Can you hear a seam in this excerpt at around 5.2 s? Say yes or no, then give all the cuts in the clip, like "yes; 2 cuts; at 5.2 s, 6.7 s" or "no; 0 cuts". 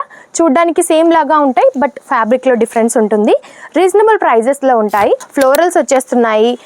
yes; 1 cut; at 5.2 s